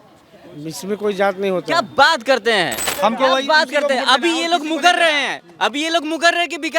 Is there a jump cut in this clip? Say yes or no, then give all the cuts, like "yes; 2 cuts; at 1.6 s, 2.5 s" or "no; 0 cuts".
yes; 1 cut; at 2.8 s